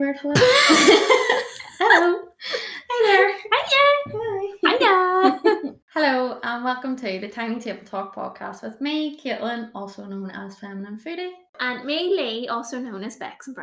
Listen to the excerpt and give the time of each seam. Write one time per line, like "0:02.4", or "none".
0:05.8
0:11.6